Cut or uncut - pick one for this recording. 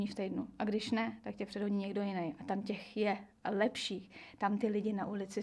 uncut